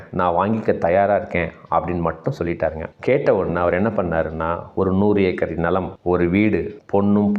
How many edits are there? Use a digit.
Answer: 1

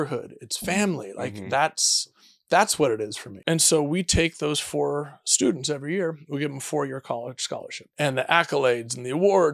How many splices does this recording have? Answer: 2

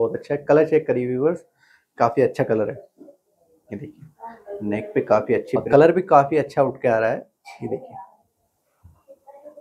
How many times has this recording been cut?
1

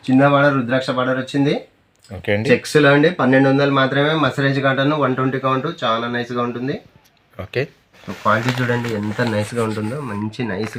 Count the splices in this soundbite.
0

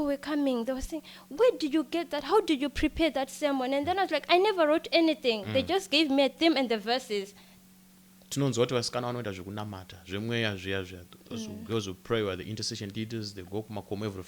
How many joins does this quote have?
1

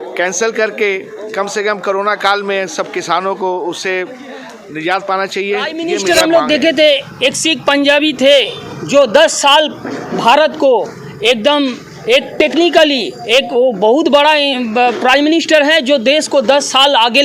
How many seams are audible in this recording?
1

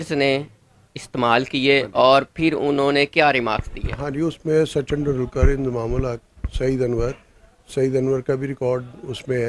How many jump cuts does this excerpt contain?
0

